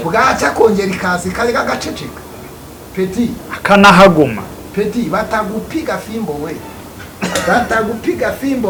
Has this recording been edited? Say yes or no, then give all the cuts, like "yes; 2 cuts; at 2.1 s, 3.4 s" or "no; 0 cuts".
no; 0 cuts